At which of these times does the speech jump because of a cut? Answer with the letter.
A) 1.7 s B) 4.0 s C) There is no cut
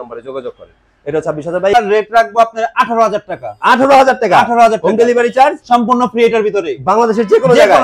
A